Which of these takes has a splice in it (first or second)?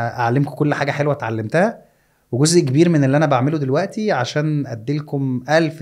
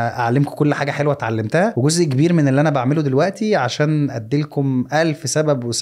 second